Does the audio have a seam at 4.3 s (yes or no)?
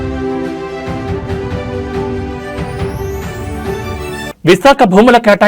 yes